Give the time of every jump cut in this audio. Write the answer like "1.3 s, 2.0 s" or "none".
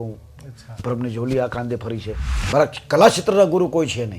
2.4 s